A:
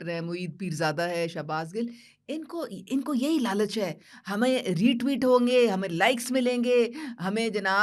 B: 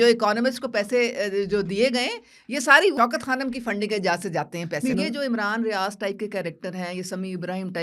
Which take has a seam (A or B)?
B